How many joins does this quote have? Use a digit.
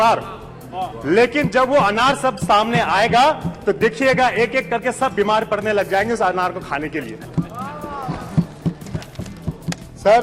0